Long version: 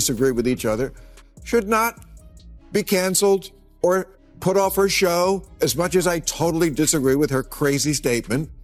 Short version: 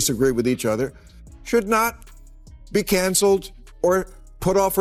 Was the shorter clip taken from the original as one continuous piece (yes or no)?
yes